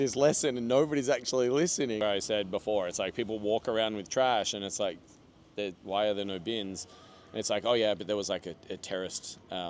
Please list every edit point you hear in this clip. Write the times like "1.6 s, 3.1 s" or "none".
2.0 s